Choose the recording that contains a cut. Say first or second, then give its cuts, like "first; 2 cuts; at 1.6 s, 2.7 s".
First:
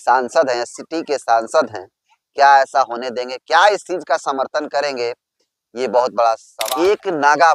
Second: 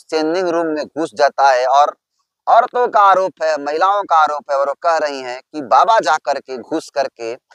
first; 1 cut; at 6.5 s